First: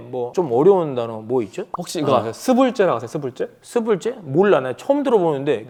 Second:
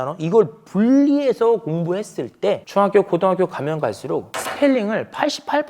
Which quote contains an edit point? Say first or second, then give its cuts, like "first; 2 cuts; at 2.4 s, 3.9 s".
second; 2 cuts; at 2.6 s, 4.4 s